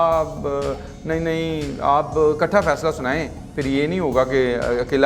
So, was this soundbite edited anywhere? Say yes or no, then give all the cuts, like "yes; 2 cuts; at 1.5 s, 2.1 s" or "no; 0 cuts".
no; 0 cuts